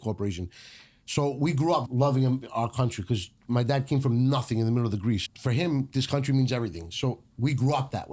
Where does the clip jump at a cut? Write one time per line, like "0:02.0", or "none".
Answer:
0:01.9
0:05.2